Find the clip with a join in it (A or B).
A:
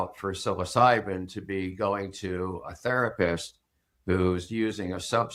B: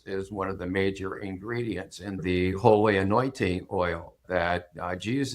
B